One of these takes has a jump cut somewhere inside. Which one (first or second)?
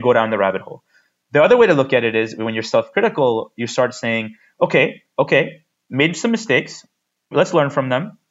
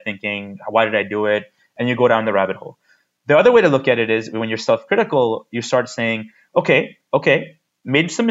first